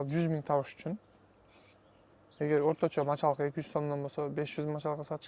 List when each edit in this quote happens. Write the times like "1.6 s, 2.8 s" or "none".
none